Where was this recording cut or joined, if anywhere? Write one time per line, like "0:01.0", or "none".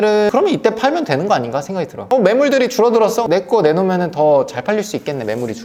none